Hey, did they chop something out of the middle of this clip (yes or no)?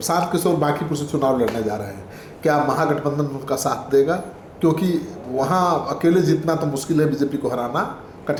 no